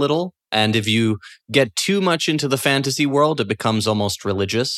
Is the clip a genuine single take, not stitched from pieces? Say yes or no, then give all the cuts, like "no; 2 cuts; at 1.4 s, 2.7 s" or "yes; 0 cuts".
yes; 0 cuts